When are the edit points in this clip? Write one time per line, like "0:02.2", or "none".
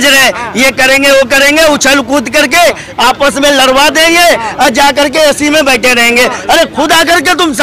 none